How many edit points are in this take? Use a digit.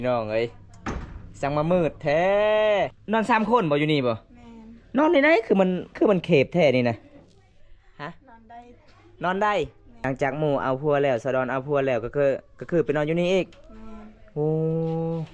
2